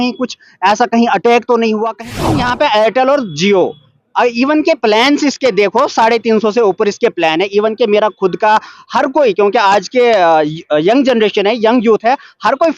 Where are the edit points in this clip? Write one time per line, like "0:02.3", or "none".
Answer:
0:02.3

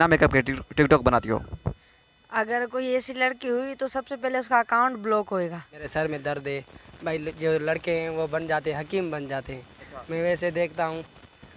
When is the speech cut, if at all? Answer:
0:05.7
0:10.0

